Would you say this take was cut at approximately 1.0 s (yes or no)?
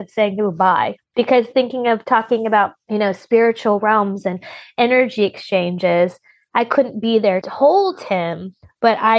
yes